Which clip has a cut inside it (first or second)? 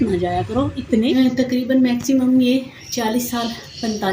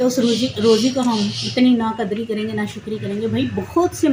first